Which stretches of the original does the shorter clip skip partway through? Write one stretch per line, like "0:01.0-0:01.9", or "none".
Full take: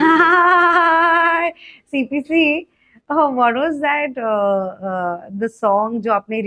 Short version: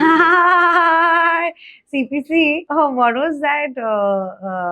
0:02.6-0:03.0